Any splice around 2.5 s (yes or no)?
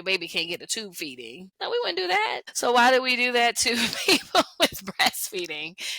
yes